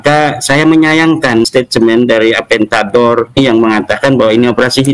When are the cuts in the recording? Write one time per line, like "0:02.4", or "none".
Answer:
0:01.5
0:03.4